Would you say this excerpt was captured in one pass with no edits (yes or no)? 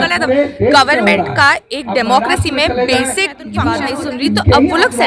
no